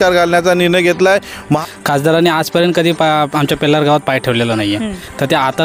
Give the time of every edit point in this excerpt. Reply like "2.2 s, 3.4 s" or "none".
1.6 s